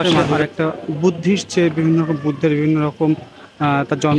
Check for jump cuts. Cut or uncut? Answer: uncut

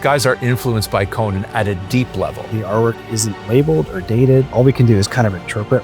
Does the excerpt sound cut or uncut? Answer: cut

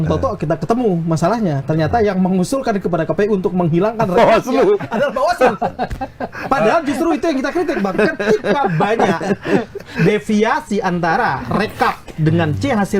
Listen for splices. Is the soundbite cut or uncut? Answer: uncut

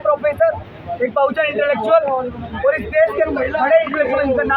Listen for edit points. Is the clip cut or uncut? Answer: uncut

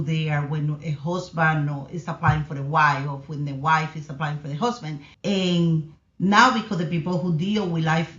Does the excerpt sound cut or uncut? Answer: cut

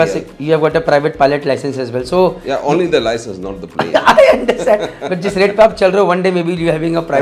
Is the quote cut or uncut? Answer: uncut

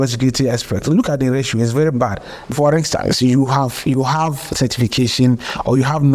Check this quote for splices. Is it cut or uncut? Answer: cut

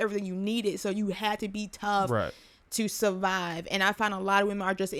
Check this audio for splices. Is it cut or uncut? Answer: uncut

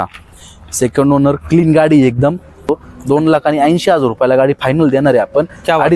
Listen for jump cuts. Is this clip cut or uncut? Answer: cut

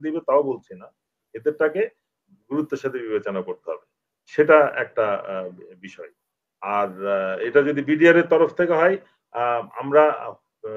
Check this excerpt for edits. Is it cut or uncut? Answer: uncut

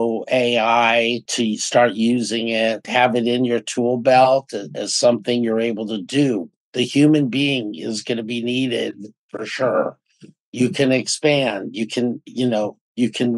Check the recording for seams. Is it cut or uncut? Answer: cut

